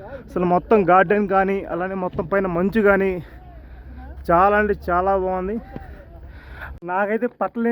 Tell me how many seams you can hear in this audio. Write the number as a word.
one